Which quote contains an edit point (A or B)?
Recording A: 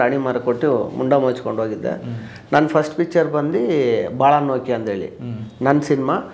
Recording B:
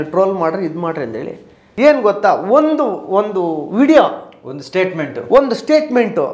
B